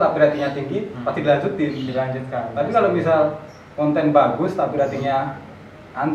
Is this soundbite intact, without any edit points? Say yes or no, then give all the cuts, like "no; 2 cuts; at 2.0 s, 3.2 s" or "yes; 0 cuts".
yes; 0 cuts